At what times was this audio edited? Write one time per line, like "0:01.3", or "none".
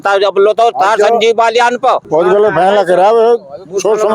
0:02.1